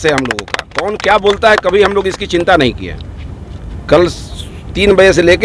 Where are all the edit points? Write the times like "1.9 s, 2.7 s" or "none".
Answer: none